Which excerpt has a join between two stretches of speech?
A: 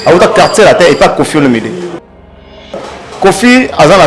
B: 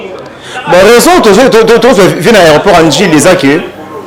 A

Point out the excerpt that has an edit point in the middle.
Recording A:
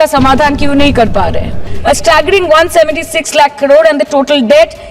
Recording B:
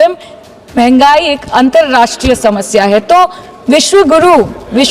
A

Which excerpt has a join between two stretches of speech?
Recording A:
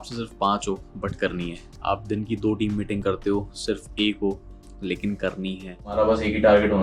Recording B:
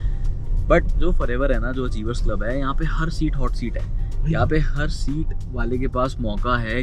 A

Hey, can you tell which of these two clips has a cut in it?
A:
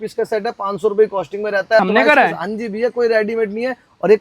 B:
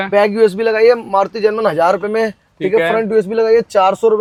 A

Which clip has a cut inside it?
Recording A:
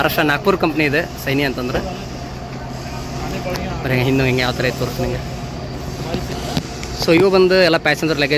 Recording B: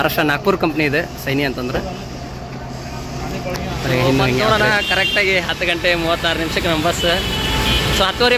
B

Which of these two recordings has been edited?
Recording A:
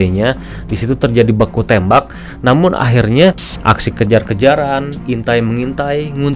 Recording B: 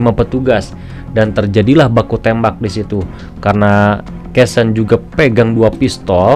A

